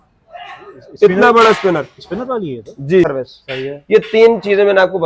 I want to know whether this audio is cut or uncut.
cut